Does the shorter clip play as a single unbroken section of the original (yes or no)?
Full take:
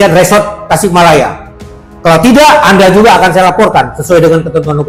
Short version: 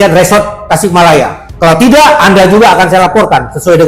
no